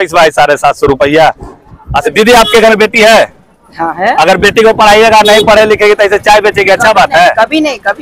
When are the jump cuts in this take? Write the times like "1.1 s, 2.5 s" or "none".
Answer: 2.0 s